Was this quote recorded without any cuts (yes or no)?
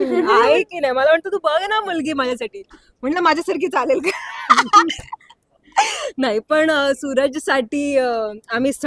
yes